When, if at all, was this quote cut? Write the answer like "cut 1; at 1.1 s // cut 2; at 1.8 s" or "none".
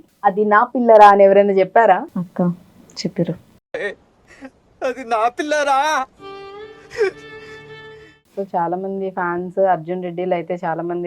cut 1; at 8.4 s